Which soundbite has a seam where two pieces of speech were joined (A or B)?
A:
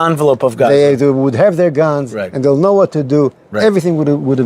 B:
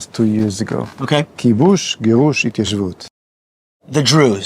B